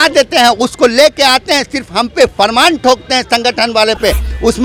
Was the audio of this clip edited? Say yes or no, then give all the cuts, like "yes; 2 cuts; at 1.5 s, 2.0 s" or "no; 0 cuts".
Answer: no; 0 cuts